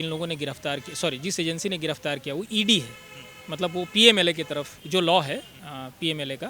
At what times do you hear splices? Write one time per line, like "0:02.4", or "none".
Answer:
0:04.8